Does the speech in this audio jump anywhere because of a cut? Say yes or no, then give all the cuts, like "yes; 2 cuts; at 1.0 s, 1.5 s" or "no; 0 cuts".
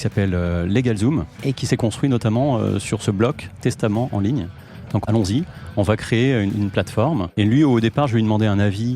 yes; 3 cuts; at 1.5 s, 5.0 s, 7.3 s